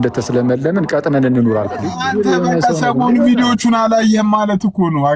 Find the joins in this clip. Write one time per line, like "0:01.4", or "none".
0:01.9